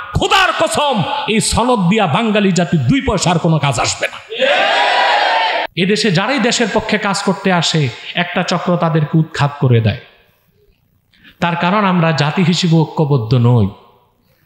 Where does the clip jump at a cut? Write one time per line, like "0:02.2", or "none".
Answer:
0:05.6